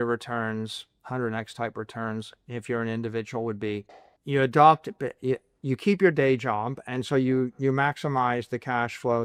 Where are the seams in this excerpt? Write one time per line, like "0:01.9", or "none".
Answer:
none